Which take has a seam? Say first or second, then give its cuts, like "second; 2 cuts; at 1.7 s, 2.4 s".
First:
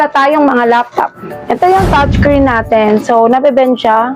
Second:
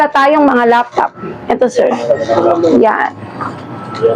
first; 1 cut; at 1.6 s